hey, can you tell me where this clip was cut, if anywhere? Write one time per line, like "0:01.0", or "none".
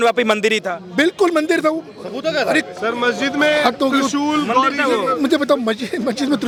none